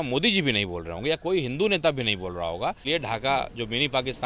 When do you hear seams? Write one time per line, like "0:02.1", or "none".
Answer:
0:02.9